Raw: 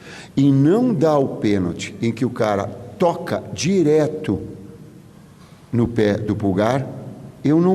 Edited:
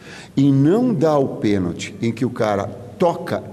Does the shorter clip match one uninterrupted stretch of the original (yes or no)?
yes